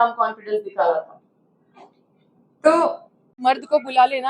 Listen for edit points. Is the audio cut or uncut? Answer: cut